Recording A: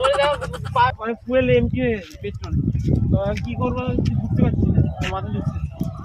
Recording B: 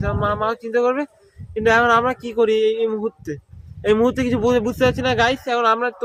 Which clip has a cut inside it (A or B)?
A